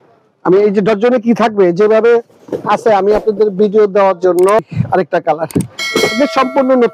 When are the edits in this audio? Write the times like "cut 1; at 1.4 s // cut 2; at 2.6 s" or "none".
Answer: cut 1; at 4.6 s